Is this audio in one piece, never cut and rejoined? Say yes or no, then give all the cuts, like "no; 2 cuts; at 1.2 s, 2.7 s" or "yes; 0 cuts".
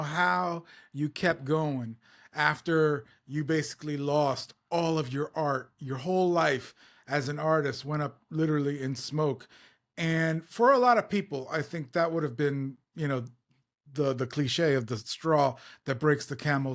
yes; 0 cuts